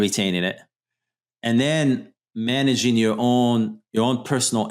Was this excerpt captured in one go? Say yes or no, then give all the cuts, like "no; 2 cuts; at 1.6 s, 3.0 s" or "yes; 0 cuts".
no; 1 cut; at 3.8 s